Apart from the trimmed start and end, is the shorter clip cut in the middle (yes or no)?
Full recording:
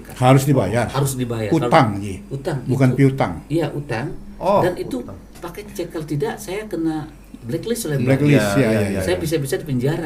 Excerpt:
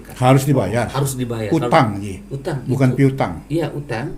no